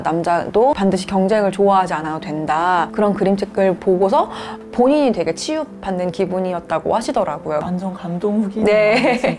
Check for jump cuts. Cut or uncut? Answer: cut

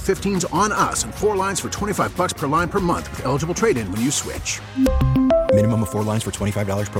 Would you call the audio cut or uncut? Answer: uncut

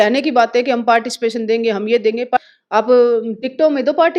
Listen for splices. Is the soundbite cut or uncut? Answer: cut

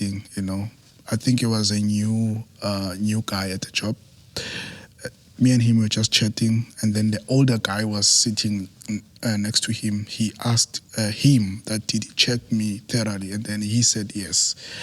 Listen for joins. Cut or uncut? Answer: uncut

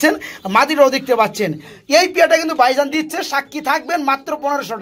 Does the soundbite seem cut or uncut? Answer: uncut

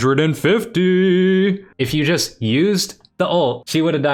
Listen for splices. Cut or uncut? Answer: uncut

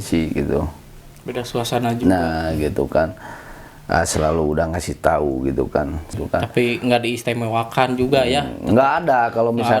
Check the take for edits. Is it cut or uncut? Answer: cut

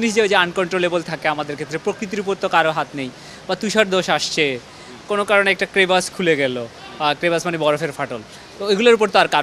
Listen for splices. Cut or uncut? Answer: uncut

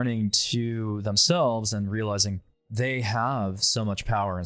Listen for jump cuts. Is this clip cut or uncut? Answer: cut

